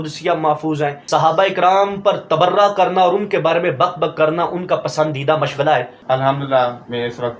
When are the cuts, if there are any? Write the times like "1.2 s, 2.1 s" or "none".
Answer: 1.0 s, 5.9 s